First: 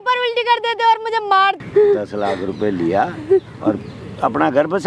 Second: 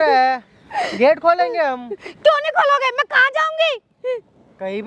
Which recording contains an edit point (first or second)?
first